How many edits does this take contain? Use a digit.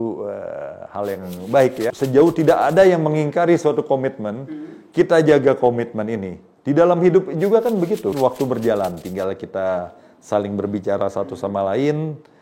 2